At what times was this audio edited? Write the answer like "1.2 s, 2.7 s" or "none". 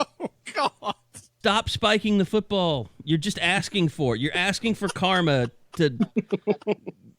1.3 s